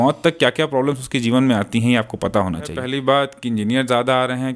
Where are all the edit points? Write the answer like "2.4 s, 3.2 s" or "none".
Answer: 2.8 s